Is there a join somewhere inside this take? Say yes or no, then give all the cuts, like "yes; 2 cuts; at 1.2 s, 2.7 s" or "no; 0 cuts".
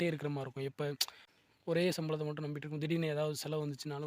yes; 1 cut; at 1.3 s